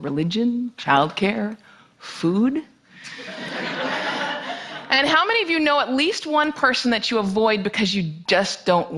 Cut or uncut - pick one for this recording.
uncut